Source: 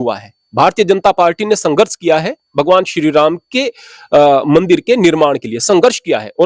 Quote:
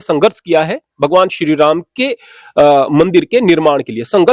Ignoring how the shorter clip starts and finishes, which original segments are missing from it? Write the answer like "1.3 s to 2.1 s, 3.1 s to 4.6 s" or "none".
none